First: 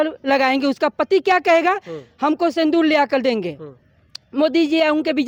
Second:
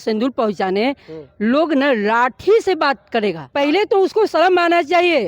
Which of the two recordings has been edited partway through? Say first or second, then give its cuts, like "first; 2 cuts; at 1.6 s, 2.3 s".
second; 1 cut; at 3.4 s